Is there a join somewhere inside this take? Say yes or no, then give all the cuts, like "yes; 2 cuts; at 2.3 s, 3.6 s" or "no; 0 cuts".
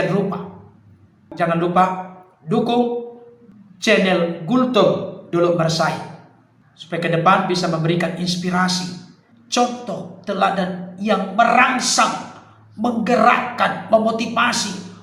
yes; 1 cut; at 1.3 s